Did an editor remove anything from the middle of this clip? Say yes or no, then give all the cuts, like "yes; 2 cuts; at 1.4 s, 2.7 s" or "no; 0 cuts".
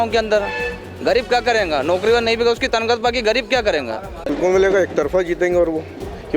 yes; 1 cut; at 4.3 s